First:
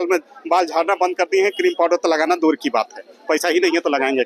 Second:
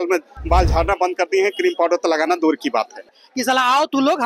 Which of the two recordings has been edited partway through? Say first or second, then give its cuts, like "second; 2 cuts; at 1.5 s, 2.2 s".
second; 1 cut; at 3.2 s